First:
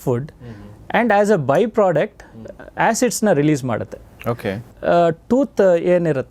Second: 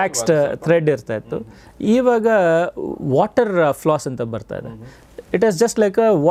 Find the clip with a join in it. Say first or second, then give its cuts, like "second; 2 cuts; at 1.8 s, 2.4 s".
first; 1 cut; at 4.7 s